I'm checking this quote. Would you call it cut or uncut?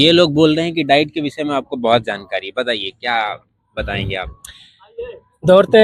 uncut